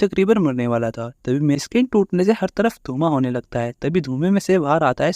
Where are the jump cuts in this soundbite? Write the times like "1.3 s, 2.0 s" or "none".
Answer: 1.6 s